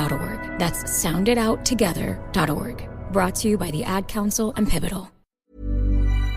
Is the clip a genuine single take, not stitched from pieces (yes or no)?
no